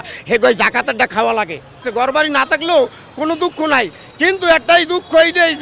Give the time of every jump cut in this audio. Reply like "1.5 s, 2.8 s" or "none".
1.8 s